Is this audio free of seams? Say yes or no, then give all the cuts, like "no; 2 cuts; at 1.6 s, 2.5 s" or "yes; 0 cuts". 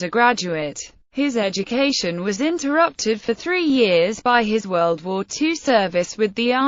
yes; 0 cuts